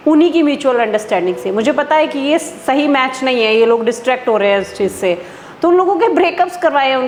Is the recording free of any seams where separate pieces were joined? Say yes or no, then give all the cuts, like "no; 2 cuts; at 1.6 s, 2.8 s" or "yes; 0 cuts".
yes; 0 cuts